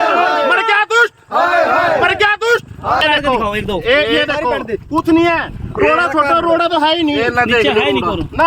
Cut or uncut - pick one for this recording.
cut